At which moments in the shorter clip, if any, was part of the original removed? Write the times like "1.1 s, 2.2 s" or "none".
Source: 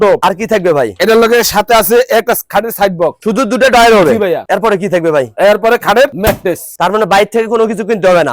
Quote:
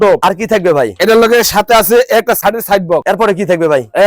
2.9 s